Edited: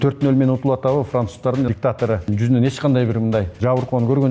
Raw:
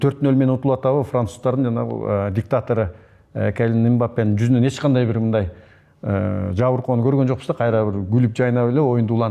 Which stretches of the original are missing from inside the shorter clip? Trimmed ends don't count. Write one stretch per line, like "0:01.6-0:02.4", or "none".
0:02.1-0:04.1
0:05.5-0:06.5